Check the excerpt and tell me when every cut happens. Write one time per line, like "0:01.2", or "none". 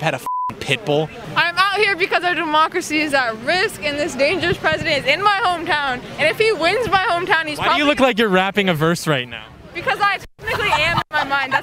0:01.2